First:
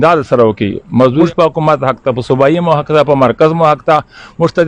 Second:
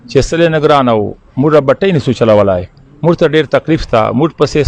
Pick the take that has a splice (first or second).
first